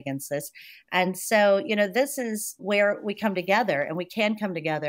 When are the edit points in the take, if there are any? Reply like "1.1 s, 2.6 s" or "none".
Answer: 2.6 s